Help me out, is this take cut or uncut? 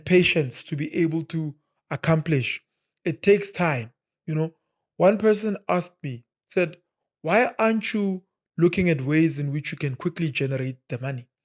uncut